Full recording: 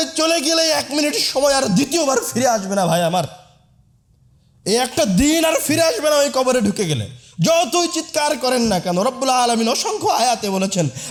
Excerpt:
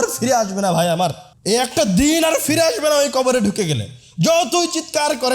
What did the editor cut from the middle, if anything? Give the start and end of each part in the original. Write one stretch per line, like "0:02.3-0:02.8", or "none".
0:03.4-0:04.5